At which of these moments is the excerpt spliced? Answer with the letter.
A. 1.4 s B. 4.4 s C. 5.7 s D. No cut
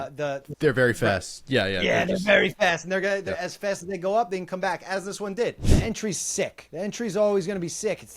C